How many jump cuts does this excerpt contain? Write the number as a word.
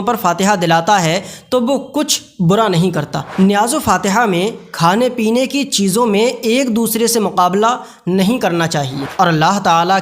two